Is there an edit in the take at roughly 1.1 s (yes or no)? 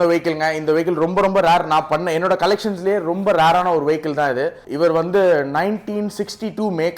no